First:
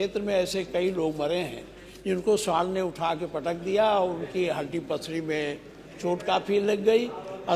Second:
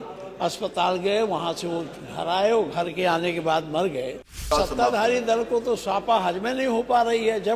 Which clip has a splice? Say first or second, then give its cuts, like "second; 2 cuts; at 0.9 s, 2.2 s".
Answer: second; 1 cut; at 4.5 s